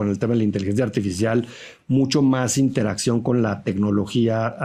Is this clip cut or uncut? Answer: uncut